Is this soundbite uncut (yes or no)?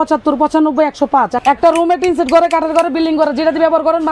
no